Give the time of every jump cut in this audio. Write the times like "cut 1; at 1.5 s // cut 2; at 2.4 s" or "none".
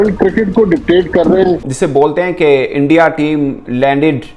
cut 1; at 1.6 s